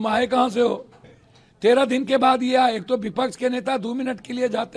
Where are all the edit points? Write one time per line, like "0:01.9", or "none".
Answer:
none